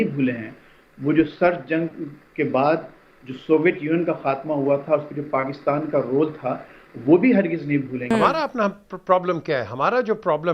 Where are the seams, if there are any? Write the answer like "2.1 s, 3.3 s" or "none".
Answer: 8.1 s